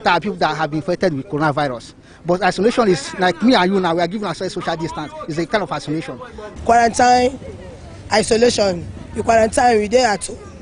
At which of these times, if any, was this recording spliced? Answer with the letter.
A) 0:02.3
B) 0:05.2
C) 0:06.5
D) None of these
C